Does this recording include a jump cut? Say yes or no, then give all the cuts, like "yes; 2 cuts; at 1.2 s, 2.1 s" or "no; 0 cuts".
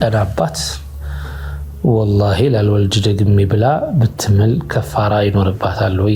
no; 0 cuts